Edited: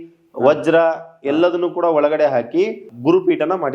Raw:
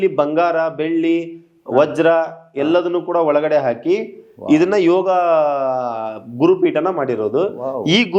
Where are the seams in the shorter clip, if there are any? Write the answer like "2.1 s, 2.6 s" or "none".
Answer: 2.9 s